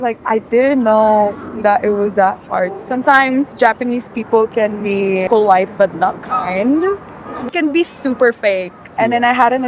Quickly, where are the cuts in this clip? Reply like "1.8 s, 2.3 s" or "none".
2.8 s, 5.2 s, 7.5 s, 8.9 s